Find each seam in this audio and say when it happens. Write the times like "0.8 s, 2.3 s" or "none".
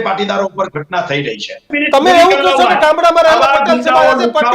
1.7 s